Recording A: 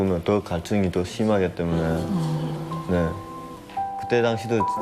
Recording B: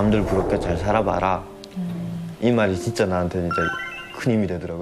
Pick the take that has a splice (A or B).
A